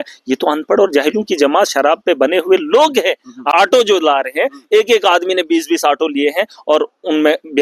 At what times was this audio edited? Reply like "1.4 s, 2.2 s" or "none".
3.5 s